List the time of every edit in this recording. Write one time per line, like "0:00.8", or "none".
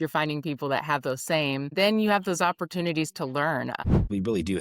0:01.7
0:03.8

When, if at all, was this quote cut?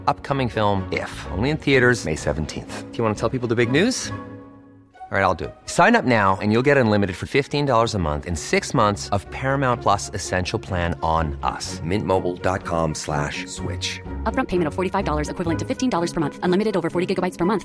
none

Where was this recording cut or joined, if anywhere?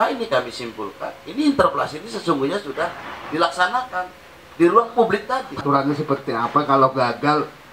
0:05.6

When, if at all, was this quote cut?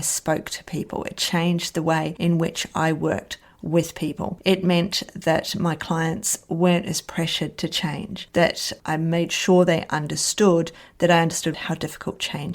0:11.6

